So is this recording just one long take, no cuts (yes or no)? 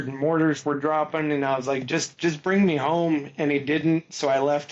yes